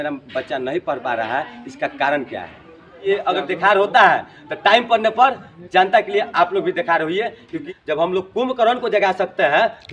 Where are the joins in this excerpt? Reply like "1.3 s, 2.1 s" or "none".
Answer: 3.0 s, 7.5 s